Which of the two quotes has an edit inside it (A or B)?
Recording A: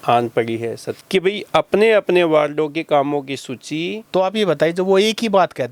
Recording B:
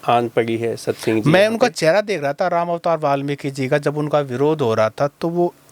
A